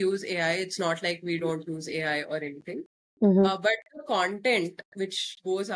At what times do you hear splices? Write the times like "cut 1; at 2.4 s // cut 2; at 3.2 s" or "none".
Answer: none